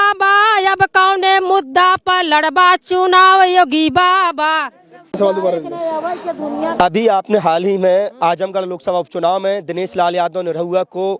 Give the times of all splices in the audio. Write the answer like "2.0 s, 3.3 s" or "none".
none